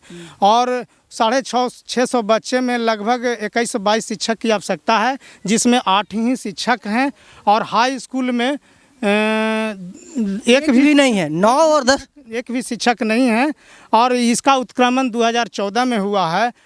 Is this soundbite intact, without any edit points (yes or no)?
yes